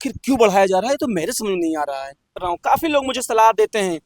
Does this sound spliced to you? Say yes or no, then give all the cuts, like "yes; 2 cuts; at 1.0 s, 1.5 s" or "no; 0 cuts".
yes; 1 cut; at 2.4 s